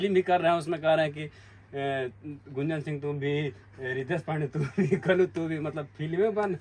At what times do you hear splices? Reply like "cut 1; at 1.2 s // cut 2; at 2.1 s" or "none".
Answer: none

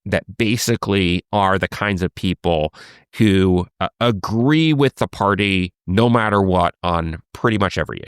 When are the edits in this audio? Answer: cut 1; at 3.1 s

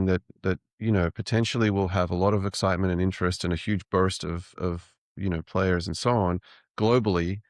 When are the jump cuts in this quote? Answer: none

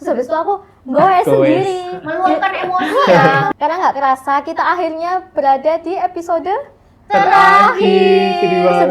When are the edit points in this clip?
cut 1; at 3.5 s

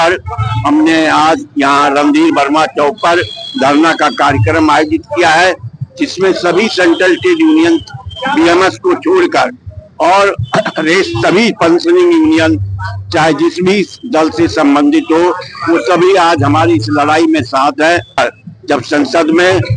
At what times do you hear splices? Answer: cut 1; at 18.2 s

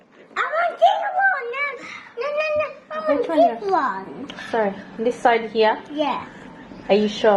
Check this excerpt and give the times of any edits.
none

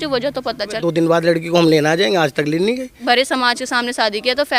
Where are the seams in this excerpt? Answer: cut 1; at 0.8 s // cut 2; at 3.0 s

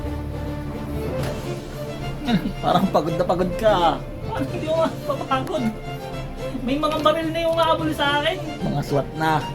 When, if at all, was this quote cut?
none

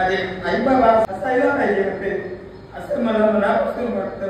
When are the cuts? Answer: cut 1; at 1.1 s

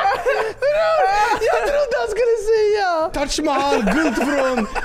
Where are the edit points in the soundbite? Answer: cut 1; at 3.2 s

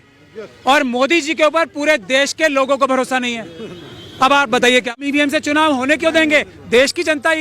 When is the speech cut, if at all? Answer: cut 1; at 4.9 s

